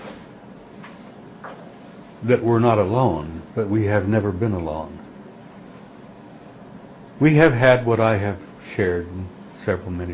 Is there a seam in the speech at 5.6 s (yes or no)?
no